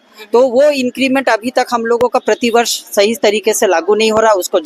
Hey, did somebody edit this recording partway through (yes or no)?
no